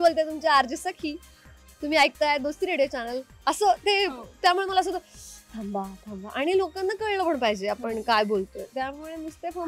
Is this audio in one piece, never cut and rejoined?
yes; 0 cuts

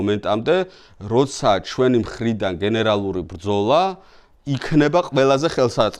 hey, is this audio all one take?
yes; 0 cuts

